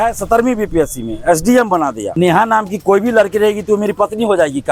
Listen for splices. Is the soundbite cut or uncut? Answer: cut